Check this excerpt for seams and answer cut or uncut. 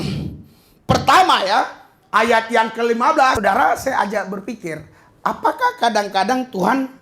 cut